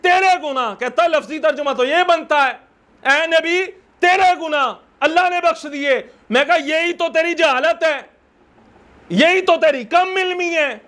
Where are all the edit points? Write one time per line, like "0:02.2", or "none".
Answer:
none